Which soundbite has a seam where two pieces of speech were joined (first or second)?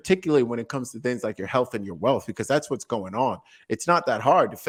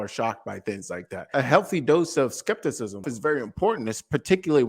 second